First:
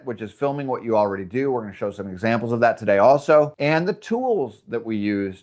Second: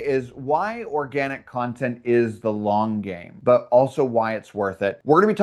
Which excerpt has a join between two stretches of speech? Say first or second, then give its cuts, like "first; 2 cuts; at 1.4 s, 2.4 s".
second; 1 cut; at 3.3 s